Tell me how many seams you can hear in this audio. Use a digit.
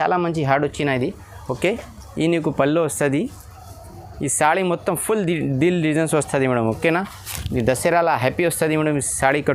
0